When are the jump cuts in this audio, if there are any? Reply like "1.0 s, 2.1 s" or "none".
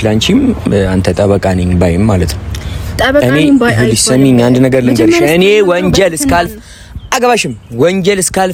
none

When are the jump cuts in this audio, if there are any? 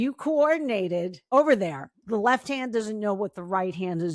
1.2 s, 2.0 s

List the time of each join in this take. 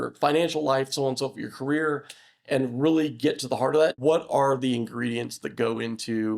4.0 s

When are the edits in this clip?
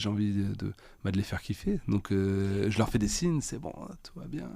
none

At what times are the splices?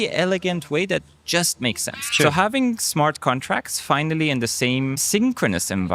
2.0 s, 5.0 s

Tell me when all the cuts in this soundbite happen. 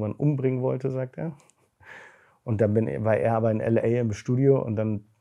none

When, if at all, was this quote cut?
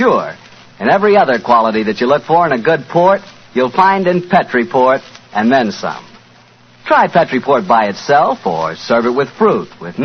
3.7 s

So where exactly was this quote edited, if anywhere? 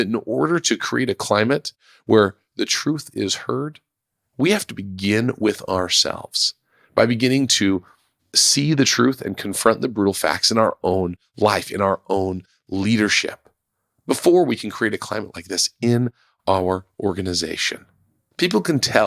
1.7 s

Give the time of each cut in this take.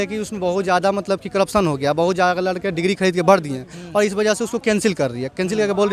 none

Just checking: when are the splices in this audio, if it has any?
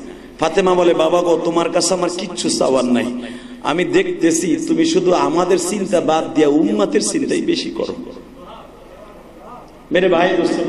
none

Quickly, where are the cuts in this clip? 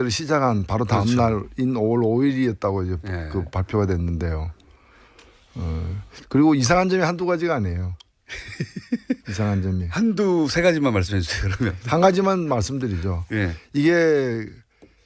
7.5 s

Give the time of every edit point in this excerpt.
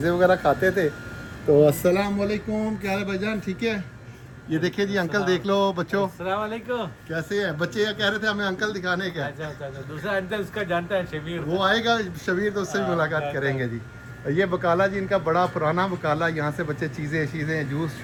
none

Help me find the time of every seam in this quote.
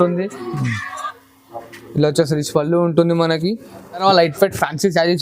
4.0 s

